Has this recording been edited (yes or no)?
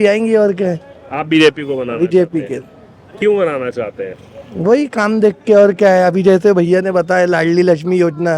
no